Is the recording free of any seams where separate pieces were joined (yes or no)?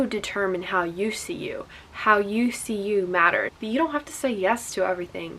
no